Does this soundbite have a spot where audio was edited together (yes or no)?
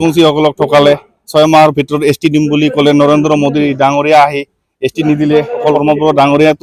yes